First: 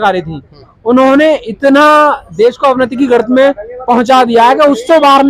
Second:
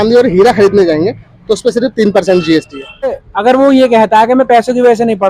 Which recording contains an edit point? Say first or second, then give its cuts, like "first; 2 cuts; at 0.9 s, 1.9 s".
second; 1 cut; at 3.2 s